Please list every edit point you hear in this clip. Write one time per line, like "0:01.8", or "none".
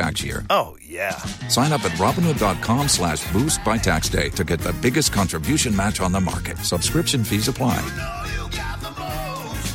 none